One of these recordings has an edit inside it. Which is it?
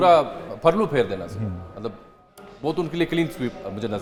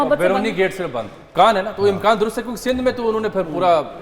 second; 1 cut; at 1.2 s

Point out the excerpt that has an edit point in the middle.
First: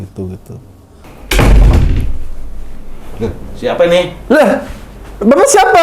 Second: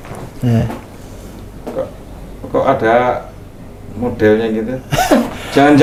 first; 1 cut; at 1.3 s

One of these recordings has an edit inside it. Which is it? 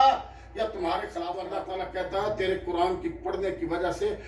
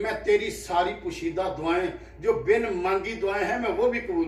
first; 1 cut; at 1.5 s

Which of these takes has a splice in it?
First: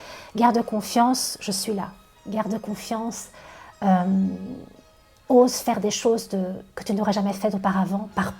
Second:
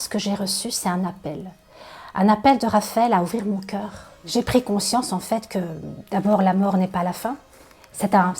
second; 1 cut; at 4.2 s

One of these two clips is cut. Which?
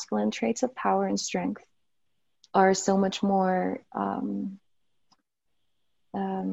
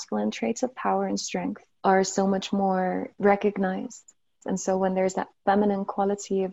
second; 3 cuts; at 1.7 s, 3.1 s, 4.4 s

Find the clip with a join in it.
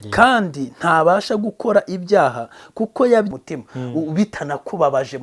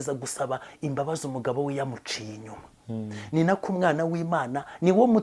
first; 1 cut; at 3.3 s

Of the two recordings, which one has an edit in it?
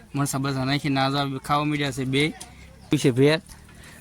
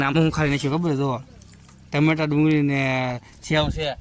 first; 1 cut; at 2.9 s

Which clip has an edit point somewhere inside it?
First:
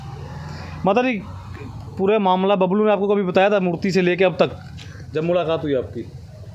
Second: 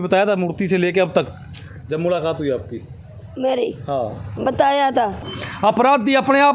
second; 1 cut; at 5.3 s

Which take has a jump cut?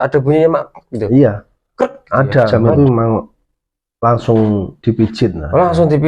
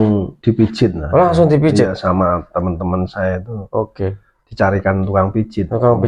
first; 1 cut; at 2.5 s

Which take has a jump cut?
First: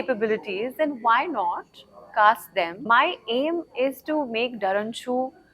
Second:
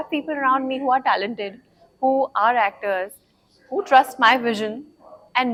first; 1 cut; at 2.8 s

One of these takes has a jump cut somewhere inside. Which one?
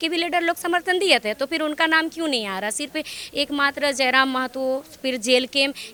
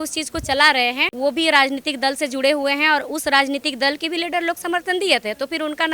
second; 1 cut; at 1.1 s

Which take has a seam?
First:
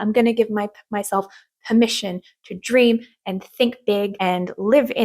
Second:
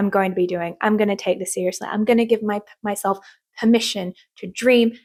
first; 1 cut; at 4.1 s

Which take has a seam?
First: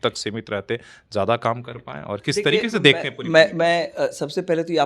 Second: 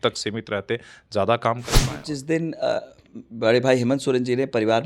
second; 1 cut; at 2.0 s

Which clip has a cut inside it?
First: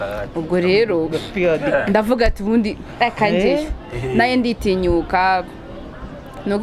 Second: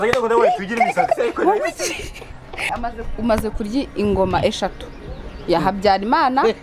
second; 1 cut; at 2.7 s

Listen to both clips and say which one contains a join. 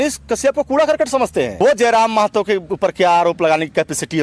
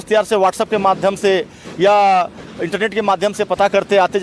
first; 1 cut; at 1.5 s

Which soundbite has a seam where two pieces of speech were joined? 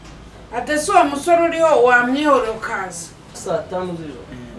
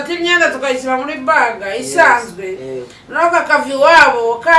first; 1 cut; at 3.4 s

